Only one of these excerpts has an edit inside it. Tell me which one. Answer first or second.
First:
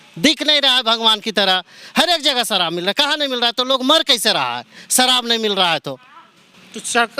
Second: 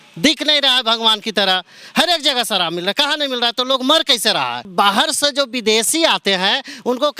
second